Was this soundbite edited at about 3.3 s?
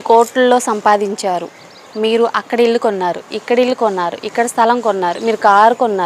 no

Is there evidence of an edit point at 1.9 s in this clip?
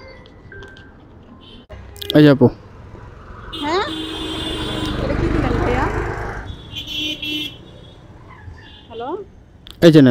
yes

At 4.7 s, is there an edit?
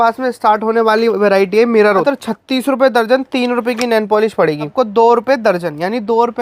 yes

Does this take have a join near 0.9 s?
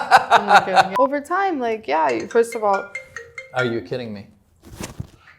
yes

